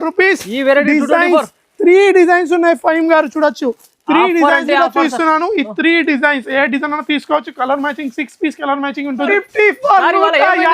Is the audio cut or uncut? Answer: cut